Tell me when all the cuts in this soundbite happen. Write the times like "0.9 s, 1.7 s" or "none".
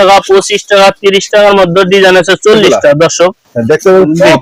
none

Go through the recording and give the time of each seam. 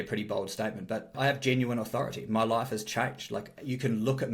1.1 s

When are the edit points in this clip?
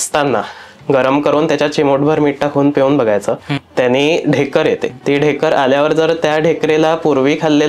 3.6 s, 5.0 s

